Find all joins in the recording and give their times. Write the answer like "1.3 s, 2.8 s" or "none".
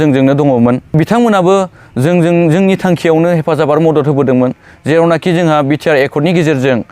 0.9 s